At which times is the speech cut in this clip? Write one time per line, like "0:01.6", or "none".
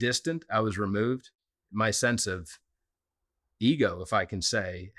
0:01.4